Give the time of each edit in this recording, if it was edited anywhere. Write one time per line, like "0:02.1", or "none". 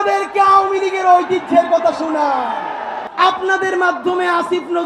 0:03.0